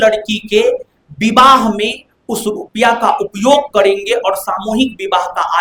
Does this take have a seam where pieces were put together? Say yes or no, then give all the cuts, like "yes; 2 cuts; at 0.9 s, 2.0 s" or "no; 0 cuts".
no; 0 cuts